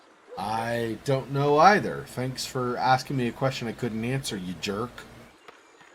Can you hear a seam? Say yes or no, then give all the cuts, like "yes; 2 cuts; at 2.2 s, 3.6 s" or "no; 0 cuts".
no; 0 cuts